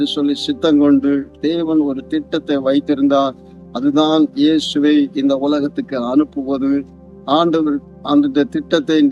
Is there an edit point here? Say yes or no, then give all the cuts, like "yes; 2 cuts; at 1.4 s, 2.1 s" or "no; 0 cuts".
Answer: no; 0 cuts